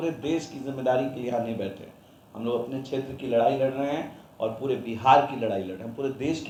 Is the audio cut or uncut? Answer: uncut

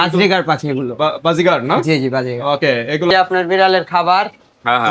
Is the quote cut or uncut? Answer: cut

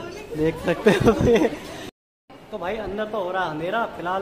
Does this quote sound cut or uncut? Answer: cut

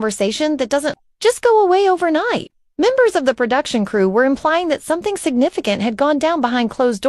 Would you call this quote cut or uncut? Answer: uncut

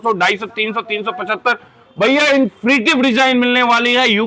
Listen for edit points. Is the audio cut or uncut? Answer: uncut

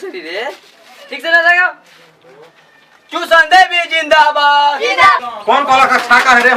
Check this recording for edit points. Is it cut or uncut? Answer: cut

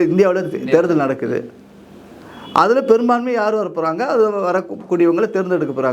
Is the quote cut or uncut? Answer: uncut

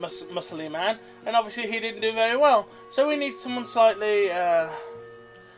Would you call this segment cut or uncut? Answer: uncut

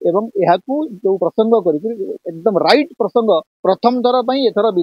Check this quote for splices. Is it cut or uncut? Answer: cut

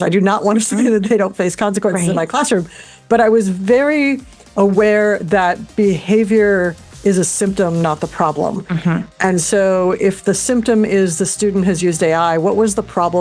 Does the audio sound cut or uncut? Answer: uncut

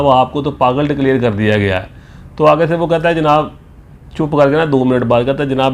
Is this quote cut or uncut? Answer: uncut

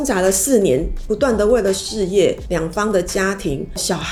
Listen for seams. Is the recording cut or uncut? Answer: uncut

